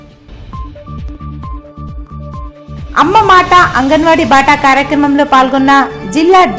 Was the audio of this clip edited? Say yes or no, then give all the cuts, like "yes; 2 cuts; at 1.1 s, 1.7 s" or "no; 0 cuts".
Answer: yes; 1 cut; at 2.4 s